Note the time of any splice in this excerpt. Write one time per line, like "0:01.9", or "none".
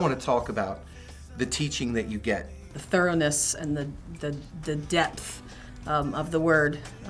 0:02.6

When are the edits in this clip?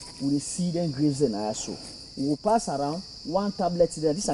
none

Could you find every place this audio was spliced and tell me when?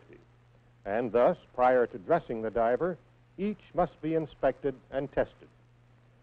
none

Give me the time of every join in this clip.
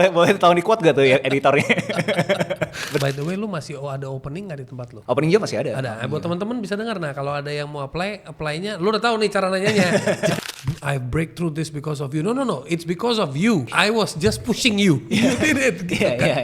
0:03.0
0:04.9
0:10.4
0:13.7

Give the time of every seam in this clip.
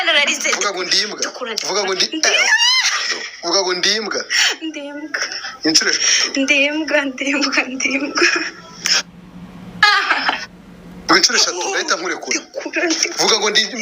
0:01.4
0:04.6

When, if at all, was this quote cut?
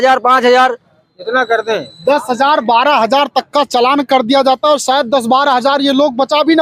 none

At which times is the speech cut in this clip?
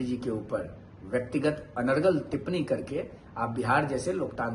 none

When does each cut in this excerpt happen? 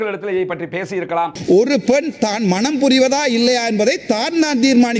0:01.4

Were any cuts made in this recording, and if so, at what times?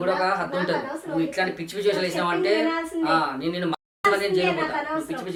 none

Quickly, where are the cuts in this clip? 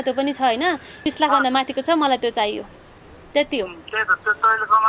0:01.0

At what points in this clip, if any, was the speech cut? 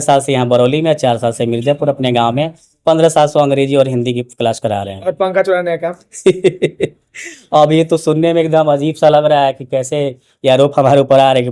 none

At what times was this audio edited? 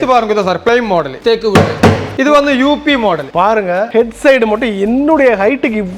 0:01.1
0:02.1
0:03.7

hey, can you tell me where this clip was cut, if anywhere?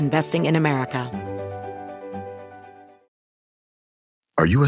0:01.1

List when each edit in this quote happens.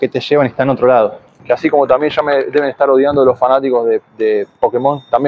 0:01.3

